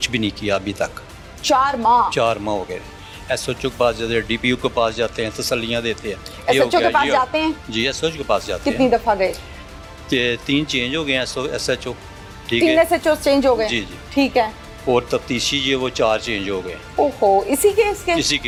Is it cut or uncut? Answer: uncut